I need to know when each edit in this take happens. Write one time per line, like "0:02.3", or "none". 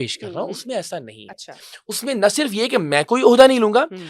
none